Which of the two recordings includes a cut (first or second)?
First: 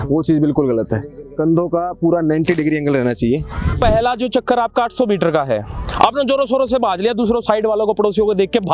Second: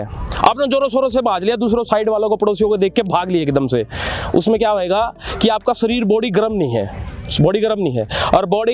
first